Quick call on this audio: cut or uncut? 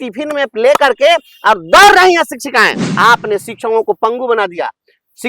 cut